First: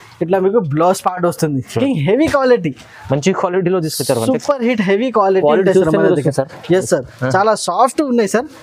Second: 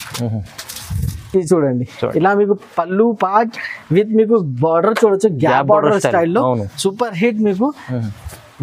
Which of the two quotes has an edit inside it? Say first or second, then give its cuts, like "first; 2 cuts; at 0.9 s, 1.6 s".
first; 1 cut; at 1.8 s